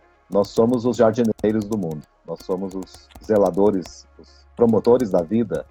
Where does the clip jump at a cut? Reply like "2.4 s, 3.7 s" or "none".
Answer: none